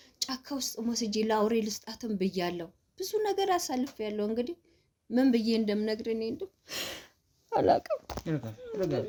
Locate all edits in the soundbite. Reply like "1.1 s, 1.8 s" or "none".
none